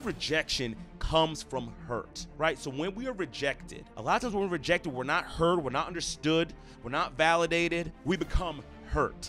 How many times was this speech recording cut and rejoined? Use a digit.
0